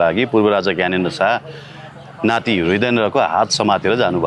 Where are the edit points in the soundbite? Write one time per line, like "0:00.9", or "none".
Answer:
none

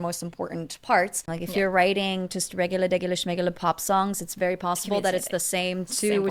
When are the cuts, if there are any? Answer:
0:01.3

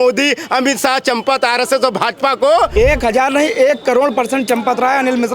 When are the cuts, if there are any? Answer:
0:02.7

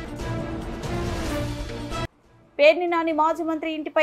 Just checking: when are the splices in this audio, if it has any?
none

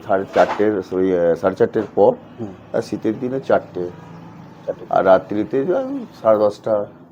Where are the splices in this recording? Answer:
none

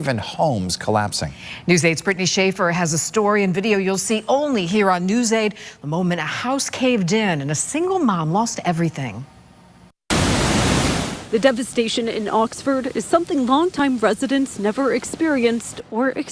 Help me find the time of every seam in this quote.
0:06.3
0:11.7

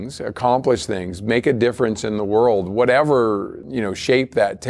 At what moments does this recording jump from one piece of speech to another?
0:03.6

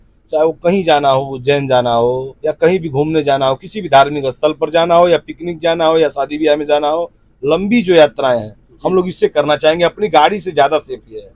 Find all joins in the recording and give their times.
none

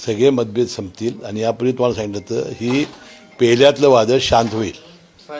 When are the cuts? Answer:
none

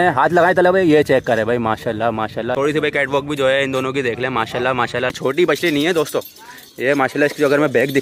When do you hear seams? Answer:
0:02.6
0:05.5

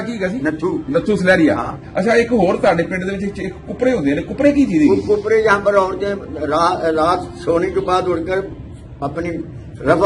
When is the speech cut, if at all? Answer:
0:01.8

